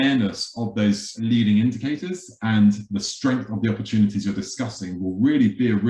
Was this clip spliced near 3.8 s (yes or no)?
no